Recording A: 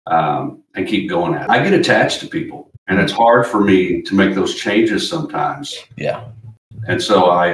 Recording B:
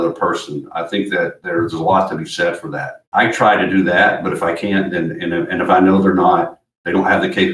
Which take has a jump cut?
A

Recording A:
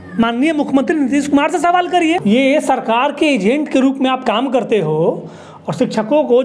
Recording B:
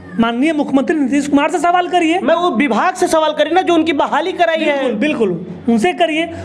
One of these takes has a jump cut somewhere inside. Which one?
A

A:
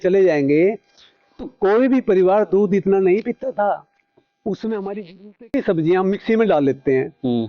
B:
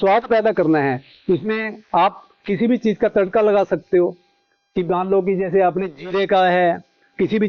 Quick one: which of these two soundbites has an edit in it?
A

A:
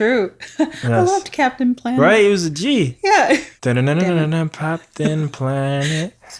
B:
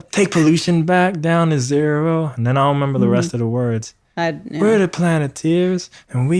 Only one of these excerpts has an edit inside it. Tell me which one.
A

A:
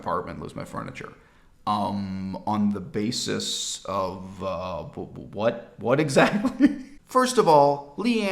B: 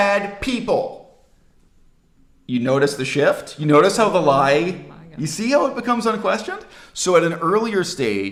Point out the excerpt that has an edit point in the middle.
A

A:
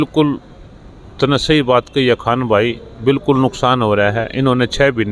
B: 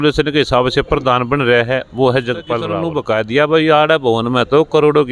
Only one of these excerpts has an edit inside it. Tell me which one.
B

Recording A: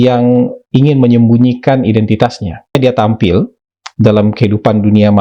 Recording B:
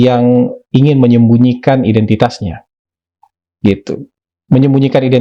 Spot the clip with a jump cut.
A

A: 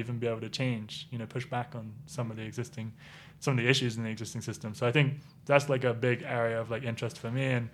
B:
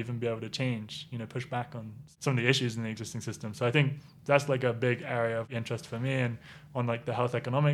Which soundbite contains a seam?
B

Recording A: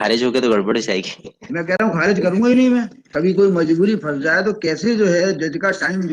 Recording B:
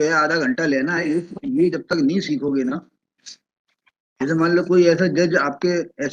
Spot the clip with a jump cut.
A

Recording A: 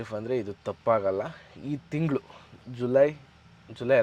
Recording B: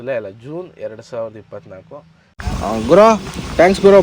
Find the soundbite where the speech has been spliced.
B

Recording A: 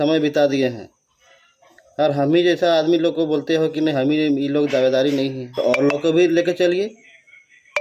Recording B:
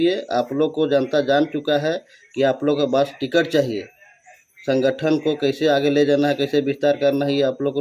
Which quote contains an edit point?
A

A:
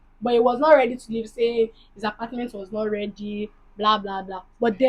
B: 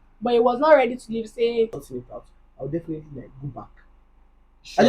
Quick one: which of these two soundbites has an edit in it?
B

